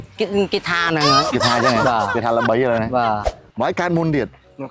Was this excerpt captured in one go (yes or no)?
no